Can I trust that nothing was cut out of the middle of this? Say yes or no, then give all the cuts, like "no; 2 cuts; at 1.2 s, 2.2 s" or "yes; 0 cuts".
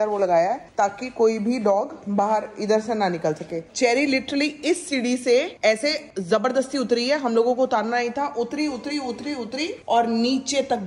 yes; 0 cuts